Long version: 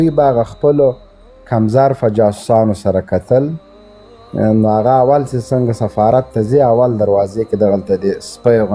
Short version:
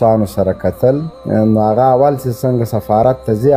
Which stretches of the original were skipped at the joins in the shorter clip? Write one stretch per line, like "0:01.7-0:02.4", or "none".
0:03.6-0:04.2

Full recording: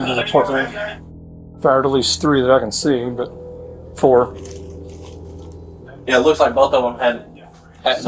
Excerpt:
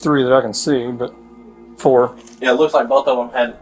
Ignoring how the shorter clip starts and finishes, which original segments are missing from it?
0:04.4-0:05.9

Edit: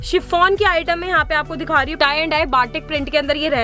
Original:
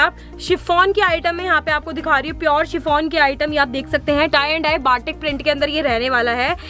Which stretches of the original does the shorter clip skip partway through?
0:02.3-0:04.3

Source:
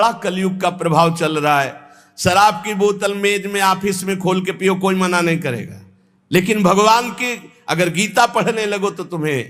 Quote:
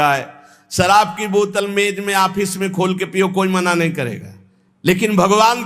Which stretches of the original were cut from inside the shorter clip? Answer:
none

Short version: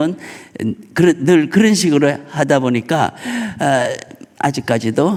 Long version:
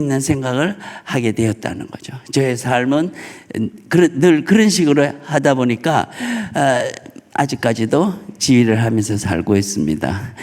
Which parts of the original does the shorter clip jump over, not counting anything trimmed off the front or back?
none

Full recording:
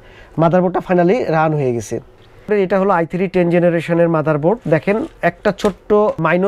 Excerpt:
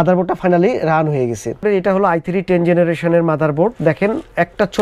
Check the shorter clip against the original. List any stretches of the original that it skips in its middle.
0:01.9-0:02.3

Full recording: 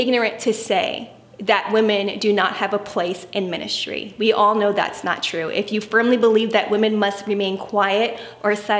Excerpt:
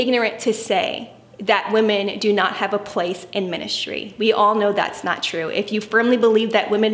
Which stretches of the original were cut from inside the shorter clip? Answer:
none

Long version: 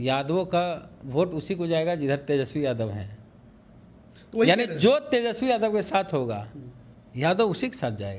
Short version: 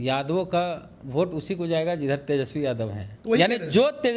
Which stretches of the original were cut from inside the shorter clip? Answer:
0:03.1-0:04.1

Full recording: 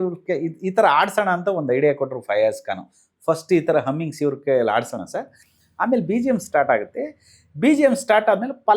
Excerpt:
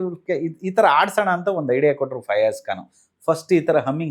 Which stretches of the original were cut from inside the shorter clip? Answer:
none

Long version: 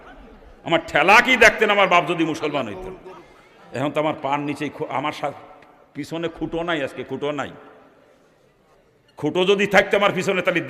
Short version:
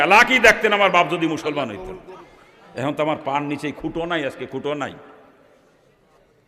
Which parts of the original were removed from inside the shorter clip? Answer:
0:04.7-0:06.3

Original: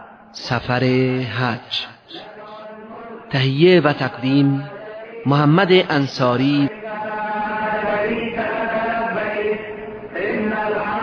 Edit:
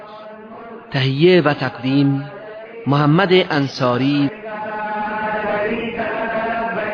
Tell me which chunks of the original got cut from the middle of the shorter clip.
none

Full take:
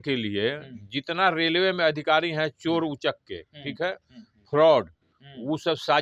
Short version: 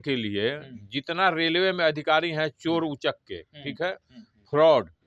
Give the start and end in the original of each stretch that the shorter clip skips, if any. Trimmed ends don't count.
none

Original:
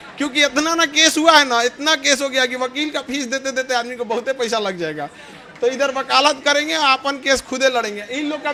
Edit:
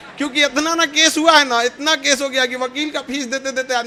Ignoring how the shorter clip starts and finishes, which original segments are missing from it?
none

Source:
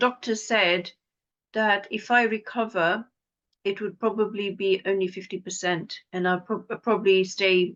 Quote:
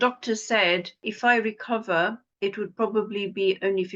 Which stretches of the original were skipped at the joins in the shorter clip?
0:01.1-0:01.9
0:03.1-0:03.5

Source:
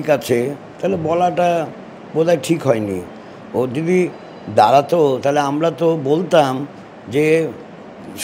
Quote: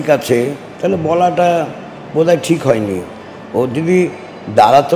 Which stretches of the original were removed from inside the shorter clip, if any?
none

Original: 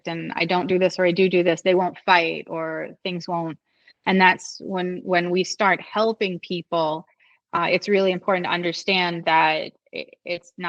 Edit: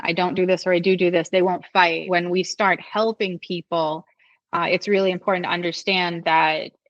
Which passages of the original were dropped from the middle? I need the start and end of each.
0:02.3-0:05.0

